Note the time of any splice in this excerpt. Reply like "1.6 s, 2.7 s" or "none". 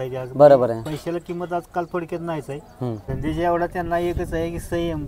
3.1 s